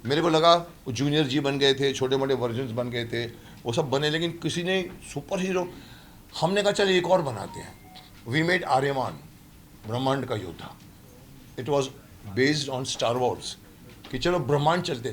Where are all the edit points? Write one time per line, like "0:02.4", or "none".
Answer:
none